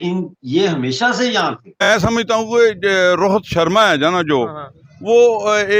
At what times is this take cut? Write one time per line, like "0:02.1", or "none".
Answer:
0:01.8